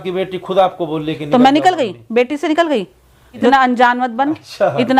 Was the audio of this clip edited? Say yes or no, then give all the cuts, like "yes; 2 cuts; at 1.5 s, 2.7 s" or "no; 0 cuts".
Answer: yes; 1 cut; at 3.5 s